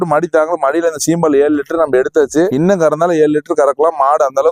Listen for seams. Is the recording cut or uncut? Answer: uncut